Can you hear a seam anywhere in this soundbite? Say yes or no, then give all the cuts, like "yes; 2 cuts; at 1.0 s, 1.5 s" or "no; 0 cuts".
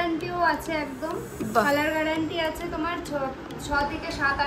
no; 0 cuts